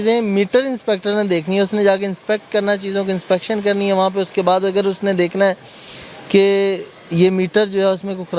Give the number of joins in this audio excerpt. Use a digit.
0